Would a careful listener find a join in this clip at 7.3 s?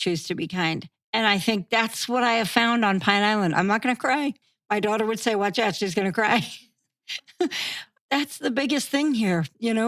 no; 0 cuts

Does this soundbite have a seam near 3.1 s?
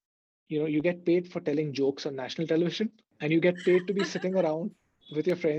yes; 1 cut; at 3.1 s

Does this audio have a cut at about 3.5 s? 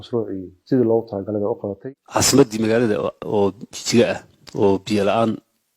no; 1 cut; at 2.0 s

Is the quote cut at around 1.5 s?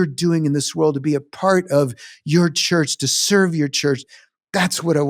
no; 1 cut; at 4.1 s

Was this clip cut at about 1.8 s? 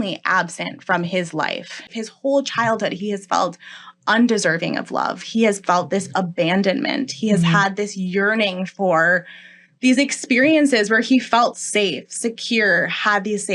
yes; 1 cut; at 1.8 s

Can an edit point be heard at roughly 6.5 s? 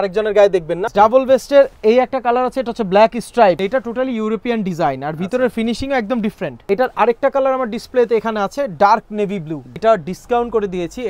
yes; 4 cuts; at 0.8 s, 3.6 s, 6.5 s, 9.8 s

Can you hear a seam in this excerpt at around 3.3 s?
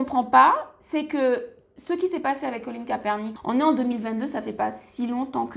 yes; 1 cut; at 3.3 s

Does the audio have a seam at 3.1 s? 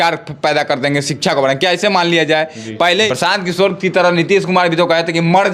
yes; 1 cut; at 3.1 s

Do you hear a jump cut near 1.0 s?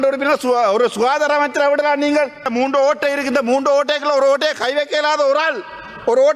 no; 1 cut; at 2.5 s

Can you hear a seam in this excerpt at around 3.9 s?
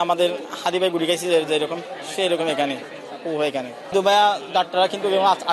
yes; 1 cut; at 3.9 s

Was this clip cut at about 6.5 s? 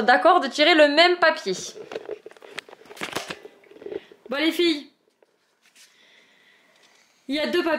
no; 0 cuts

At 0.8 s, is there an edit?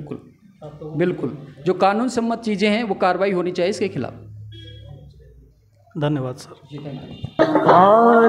no; 0 cuts

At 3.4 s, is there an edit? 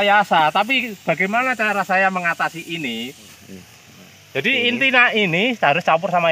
yes; 1 cut; at 3.4 s

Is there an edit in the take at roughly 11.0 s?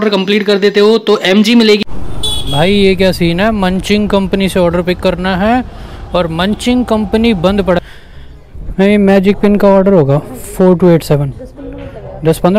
no; 2 cuts; at 1.8 s, 7.8 s

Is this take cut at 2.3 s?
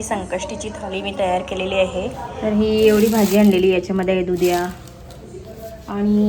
yes; 1 cut; at 2.3 s

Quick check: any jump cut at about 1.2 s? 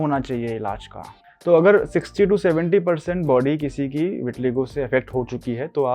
yes; 1 cut; at 1.2 s

